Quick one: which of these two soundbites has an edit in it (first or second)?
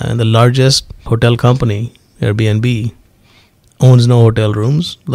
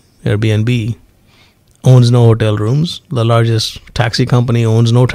first